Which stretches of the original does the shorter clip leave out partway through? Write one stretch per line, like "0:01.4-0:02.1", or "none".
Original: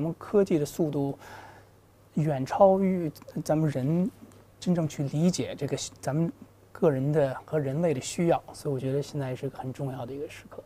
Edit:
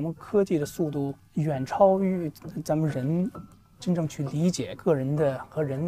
0:01.2-0:02.0
0:05.5-0:06.7